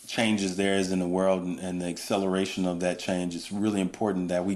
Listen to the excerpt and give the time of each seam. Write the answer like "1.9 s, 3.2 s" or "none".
none